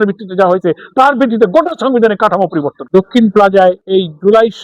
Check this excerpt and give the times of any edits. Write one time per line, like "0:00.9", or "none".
0:02.8
0:03.8